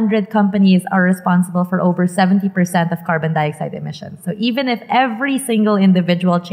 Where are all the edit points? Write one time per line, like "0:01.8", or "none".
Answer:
none